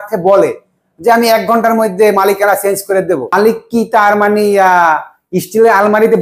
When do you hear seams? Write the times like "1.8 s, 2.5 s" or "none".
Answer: 3.3 s